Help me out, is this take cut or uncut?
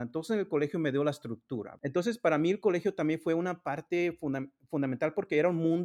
cut